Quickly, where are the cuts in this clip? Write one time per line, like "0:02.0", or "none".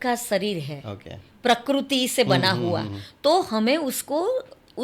none